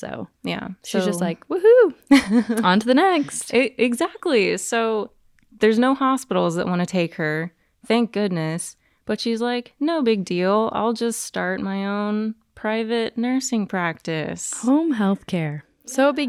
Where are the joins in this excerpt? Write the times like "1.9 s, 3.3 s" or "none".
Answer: none

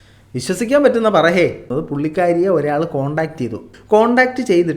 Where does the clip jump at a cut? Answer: 1.6 s, 3.7 s

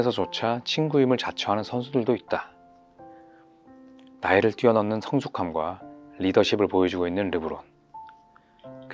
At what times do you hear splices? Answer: 2.5 s, 4.2 s

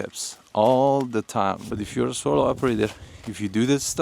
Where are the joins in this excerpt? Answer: 1.7 s

